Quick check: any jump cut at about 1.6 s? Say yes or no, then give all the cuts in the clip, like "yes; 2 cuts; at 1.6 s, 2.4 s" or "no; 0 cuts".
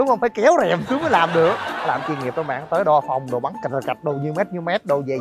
yes; 1 cut; at 1.6 s